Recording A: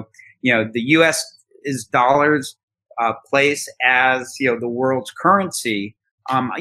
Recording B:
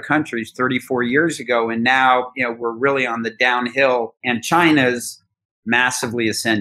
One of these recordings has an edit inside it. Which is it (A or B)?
B